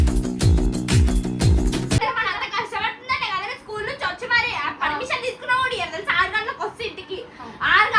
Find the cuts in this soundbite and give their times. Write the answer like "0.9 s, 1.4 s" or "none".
2.0 s